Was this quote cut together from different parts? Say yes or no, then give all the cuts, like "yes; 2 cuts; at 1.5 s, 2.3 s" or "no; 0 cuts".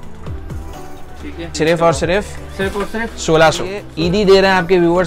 yes; 2 cuts; at 1.5 s, 3.8 s